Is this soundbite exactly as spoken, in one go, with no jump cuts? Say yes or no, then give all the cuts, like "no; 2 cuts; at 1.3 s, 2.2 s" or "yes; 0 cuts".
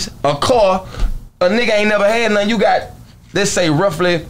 yes; 0 cuts